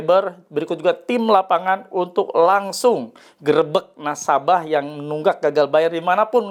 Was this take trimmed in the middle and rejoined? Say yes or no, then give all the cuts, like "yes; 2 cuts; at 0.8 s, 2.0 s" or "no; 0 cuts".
no; 0 cuts